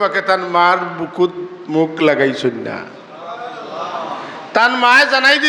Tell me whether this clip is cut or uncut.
uncut